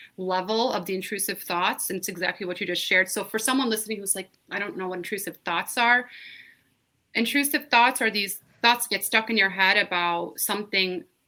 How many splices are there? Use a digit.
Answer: 0